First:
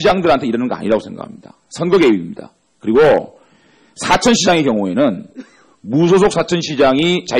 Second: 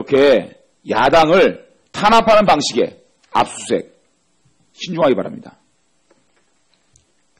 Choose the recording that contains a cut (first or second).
first